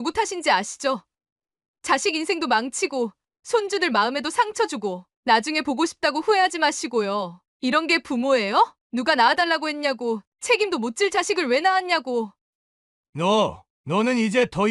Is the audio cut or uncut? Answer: cut